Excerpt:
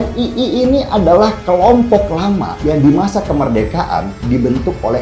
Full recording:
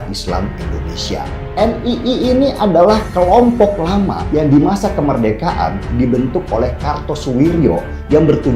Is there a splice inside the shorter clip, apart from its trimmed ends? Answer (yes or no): no